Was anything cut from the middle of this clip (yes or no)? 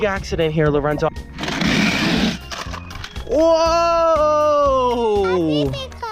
yes